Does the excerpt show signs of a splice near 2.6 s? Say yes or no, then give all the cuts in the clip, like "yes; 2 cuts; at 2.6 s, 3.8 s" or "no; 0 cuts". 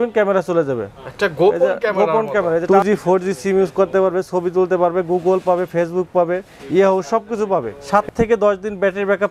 yes; 2 cuts; at 2.6 s, 7.8 s